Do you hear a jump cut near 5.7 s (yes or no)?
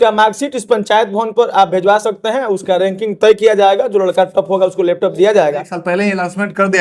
yes